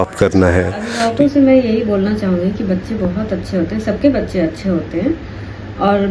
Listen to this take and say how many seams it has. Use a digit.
1